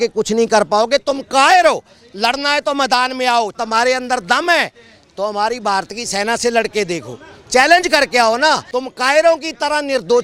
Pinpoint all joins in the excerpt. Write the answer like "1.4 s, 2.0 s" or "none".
3.5 s, 8.7 s